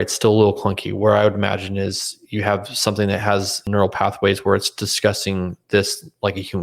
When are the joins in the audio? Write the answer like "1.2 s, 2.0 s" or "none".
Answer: 3.6 s